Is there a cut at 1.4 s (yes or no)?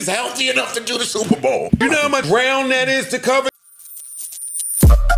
no